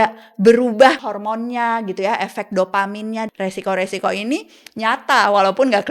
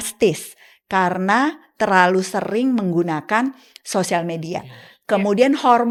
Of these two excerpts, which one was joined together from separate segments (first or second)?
first